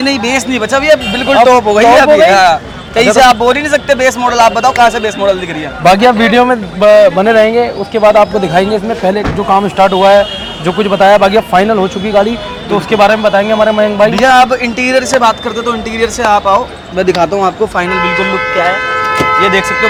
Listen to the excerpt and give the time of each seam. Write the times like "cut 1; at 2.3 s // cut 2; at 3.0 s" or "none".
none